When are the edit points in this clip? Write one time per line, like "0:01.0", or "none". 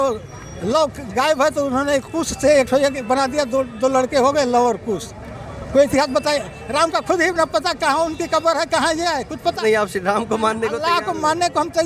0:09.6